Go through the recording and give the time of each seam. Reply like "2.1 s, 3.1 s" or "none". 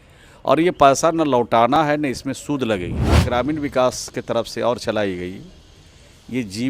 3.2 s

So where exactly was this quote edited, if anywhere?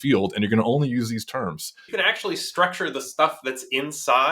1.9 s

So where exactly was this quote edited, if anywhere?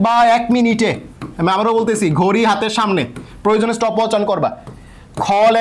none

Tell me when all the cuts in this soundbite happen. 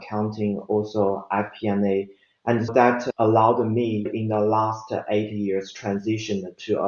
2.7 s

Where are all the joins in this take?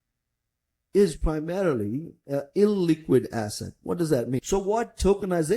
4.4 s

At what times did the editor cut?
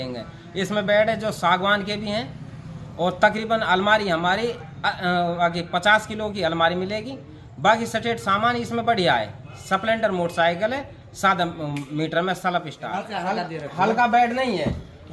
13.2 s

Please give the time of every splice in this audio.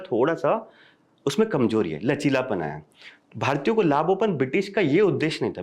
none

